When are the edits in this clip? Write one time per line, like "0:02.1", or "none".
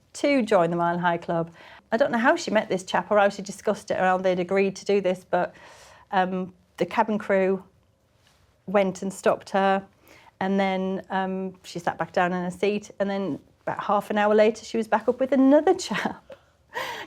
0:01.7